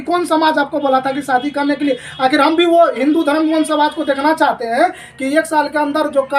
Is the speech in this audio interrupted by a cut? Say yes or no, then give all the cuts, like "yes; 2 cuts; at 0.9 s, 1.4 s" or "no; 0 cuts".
no; 0 cuts